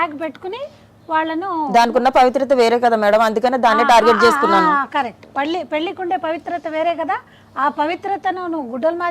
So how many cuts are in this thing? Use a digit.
0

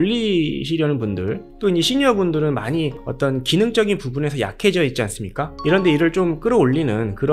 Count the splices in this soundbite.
1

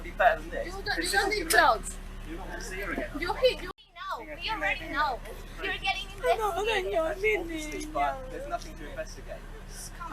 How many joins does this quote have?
1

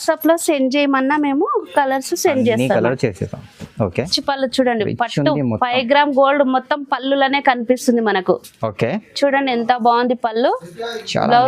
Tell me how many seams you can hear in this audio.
1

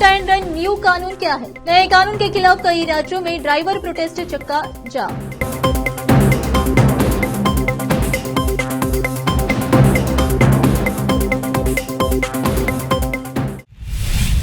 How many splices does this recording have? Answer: 1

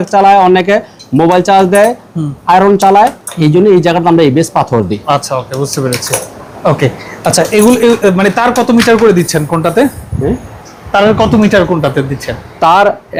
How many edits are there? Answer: 0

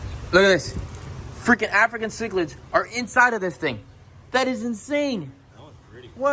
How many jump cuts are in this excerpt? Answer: 0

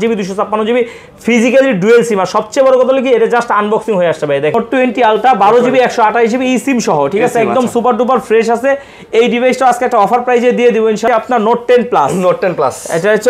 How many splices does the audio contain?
2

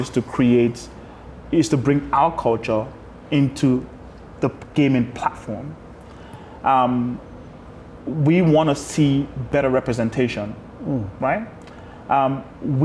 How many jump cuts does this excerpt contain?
0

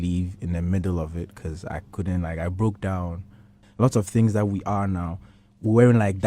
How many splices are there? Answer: 1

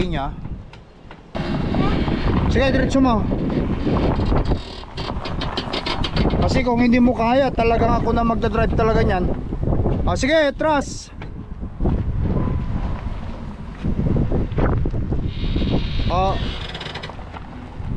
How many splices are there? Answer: 1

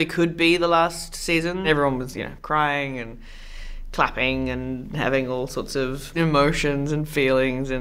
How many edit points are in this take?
1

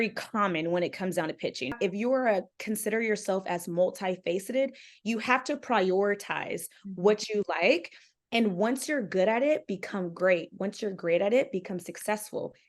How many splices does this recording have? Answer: 1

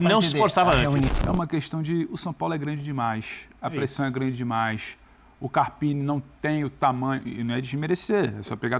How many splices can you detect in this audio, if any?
1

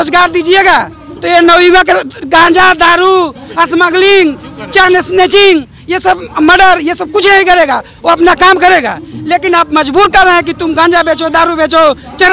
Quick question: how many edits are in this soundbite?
0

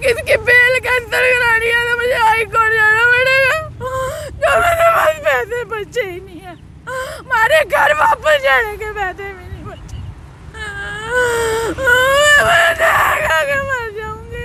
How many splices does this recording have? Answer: 0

